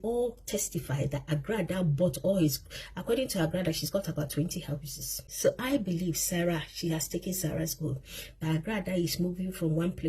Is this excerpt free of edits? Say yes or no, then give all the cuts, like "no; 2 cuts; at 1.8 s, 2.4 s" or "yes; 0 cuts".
no; 1 cut; at 5.3 s